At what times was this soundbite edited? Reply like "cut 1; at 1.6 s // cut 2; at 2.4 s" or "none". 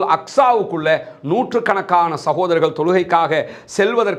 none